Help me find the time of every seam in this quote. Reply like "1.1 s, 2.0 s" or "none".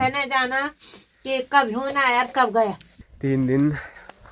2.9 s

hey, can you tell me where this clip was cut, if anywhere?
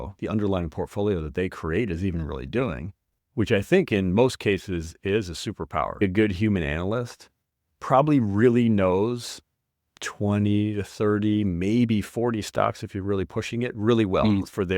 6.0 s

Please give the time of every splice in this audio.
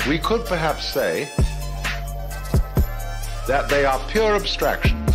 1.3 s

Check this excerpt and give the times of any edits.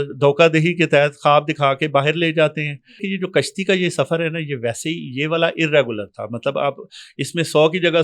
3.0 s

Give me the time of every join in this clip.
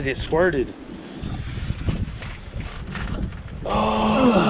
1.2 s

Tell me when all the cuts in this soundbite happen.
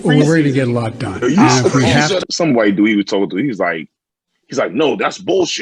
2.2 s

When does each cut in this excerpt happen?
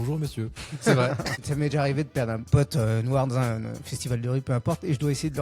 1.4 s, 2.5 s

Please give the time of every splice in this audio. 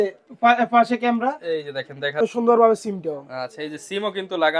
2.2 s

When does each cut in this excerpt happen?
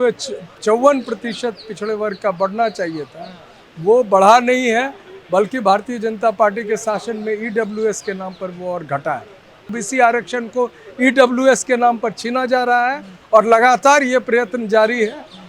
9.8 s

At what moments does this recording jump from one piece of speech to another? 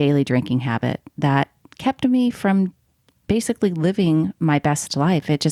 none

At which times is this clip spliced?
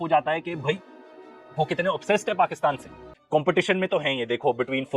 3.1 s

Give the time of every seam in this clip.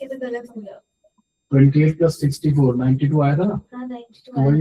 none

